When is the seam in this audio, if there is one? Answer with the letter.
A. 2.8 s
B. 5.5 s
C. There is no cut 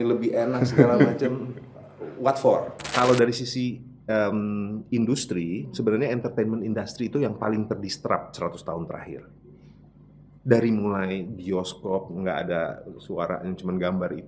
A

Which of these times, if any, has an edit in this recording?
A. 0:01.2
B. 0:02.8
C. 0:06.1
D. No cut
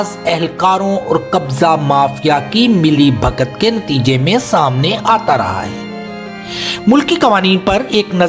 D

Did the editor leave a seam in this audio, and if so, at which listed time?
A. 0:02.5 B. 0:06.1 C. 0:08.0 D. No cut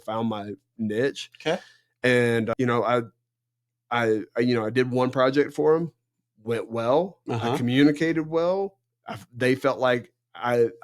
A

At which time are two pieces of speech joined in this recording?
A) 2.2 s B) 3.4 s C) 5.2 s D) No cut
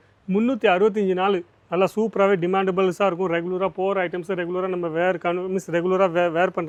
D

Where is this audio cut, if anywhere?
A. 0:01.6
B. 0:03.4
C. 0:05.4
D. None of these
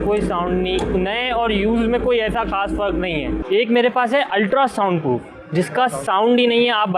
B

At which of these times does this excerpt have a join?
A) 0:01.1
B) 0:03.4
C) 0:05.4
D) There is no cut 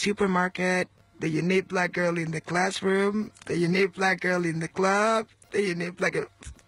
D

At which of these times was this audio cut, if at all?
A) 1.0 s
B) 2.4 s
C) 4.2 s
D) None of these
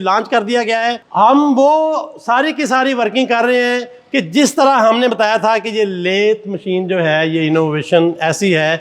A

